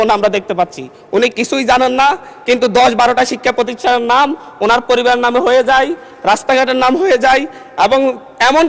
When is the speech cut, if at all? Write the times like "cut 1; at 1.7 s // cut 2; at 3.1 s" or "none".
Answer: none